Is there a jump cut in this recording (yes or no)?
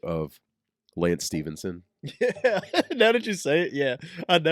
no